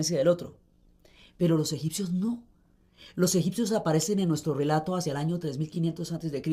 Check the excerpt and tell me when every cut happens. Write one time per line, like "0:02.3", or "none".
0:05.2